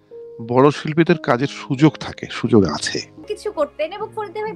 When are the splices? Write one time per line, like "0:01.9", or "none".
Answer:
0:03.2